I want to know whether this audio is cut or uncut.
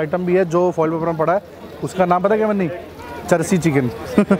uncut